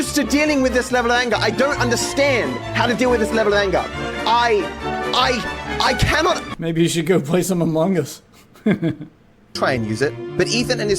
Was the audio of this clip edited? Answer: yes; 1 cut; at 9.5 s

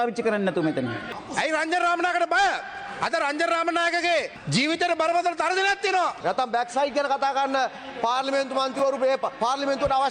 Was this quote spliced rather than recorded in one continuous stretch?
yes; 2 cuts; at 1.1 s, 6.2 s

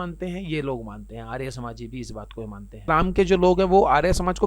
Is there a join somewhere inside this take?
yes; 1 cut; at 2.8 s

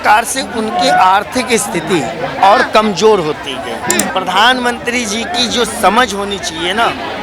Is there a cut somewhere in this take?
yes; 1 cut; at 4.1 s

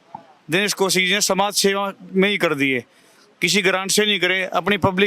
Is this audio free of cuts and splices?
yes; 0 cuts

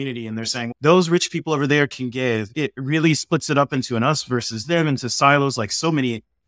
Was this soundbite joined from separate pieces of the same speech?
yes; 1 cut; at 2.5 s

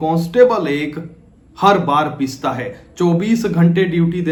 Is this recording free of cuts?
yes; 0 cuts

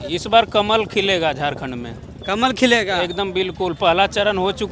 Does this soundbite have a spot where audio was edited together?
no; 0 cuts

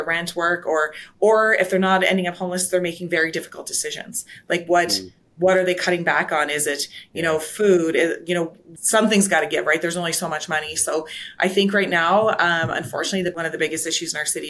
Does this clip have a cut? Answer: yes; 2 cuts; at 8.7 s, 13.3 s

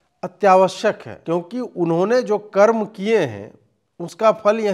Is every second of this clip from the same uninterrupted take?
no; 1 cut; at 1.1 s

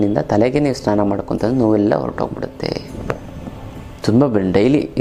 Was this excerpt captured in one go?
yes; 0 cuts

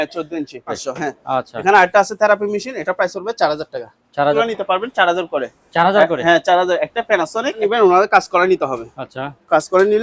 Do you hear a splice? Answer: yes; 3 cuts; at 0.8 s, 4.4 s, 7.6 s

